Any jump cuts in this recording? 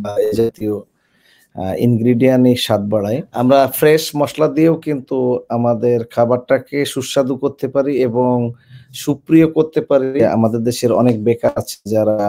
yes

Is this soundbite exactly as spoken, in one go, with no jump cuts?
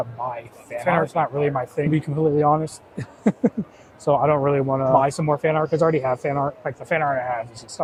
yes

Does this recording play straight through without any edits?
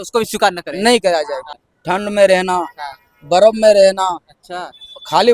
no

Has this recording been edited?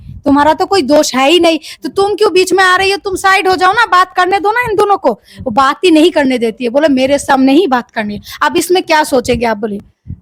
no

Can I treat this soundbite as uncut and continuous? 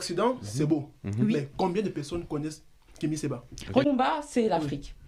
no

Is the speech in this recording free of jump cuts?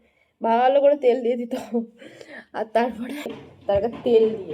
no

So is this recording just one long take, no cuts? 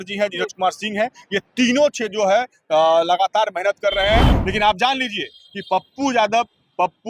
no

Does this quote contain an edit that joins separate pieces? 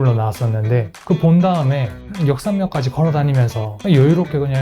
yes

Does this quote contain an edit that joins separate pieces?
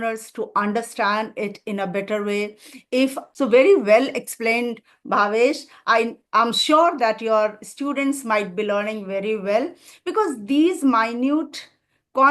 yes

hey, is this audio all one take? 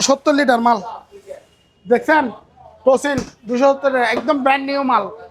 yes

